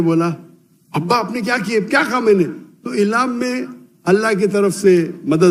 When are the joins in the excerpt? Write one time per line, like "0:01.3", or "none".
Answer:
none